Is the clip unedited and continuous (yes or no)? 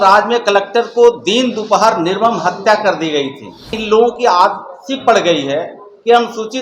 no